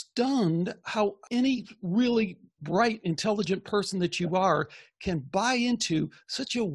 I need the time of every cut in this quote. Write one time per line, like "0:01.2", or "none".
0:01.2